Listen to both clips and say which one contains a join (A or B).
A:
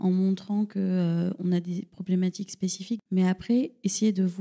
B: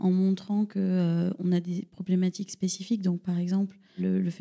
A